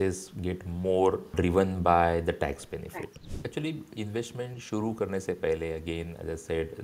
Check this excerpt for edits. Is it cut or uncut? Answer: cut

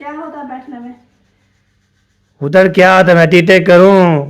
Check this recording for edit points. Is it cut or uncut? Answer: uncut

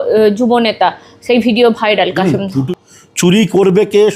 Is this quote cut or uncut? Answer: cut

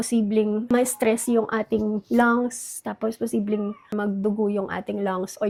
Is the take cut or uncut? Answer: uncut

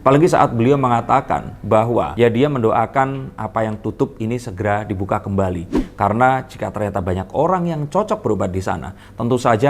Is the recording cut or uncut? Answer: uncut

